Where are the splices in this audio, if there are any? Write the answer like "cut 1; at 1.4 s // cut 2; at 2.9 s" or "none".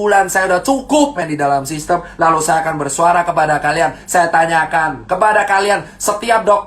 cut 1; at 1.2 s